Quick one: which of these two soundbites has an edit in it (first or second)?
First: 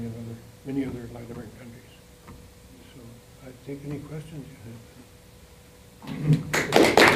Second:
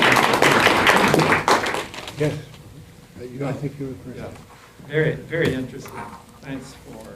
second